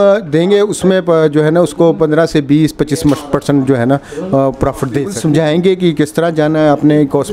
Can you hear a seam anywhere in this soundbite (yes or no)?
yes